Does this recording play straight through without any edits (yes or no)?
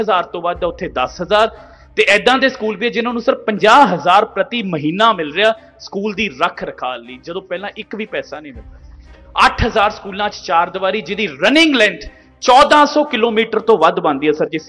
no